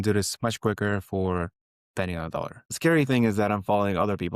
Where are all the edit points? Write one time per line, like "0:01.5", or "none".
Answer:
0:02.6